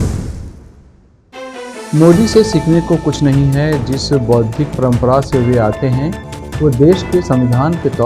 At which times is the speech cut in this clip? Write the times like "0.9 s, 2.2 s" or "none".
1.2 s